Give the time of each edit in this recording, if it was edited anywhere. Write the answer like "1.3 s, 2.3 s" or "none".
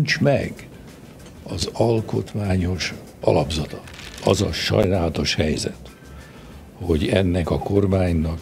4.2 s